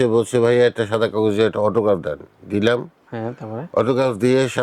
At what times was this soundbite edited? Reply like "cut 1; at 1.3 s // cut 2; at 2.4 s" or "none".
none